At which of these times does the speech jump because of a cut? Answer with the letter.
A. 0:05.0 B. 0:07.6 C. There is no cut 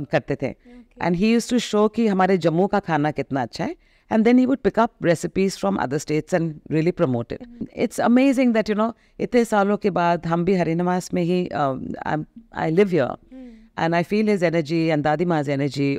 B